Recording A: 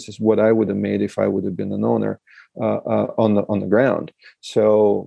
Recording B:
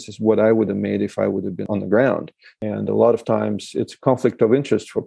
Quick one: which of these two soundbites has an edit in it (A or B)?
B